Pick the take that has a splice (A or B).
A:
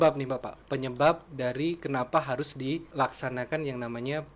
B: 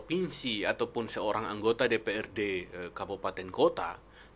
A